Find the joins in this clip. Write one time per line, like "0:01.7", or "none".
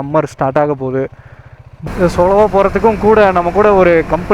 0:01.7